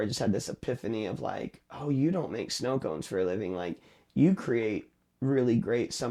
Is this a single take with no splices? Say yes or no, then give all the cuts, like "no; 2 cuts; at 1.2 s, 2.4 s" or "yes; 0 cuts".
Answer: yes; 0 cuts